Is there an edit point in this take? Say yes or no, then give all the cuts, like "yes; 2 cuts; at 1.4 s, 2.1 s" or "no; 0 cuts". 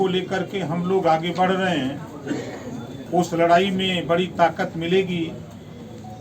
yes; 1 cut; at 3.0 s